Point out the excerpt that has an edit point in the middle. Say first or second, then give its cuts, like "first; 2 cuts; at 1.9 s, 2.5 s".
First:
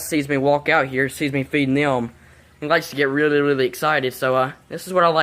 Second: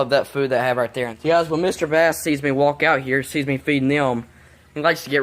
second; 1 cut; at 1.1 s